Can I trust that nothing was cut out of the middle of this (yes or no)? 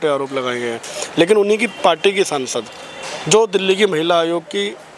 yes